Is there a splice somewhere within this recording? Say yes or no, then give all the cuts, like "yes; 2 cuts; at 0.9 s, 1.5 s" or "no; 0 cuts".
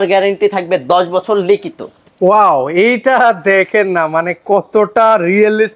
no; 0 cuts